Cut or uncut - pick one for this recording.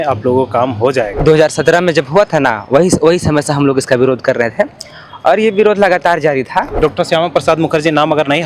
cut